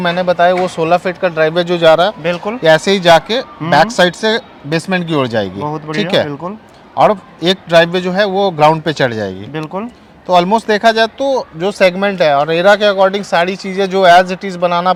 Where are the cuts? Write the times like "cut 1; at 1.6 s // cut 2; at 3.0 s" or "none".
none